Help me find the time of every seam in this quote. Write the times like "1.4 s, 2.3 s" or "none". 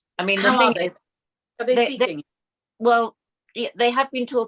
none